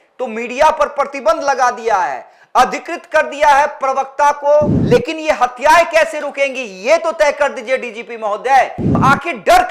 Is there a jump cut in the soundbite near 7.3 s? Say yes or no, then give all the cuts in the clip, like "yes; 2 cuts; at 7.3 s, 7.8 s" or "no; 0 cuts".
no; 2 cuts; at 4.8 s, 8.9 s